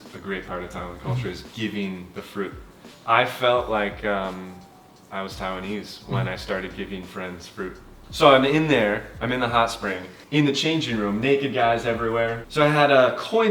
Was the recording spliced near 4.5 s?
no; 3 cuts; at 8.0 s, 10.1 s, 12.4 s

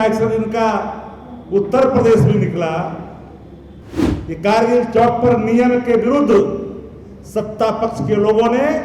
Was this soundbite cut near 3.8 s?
yes; 1 cut; at 3.8 s

